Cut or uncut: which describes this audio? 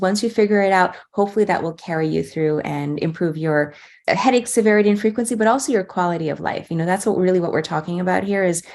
cut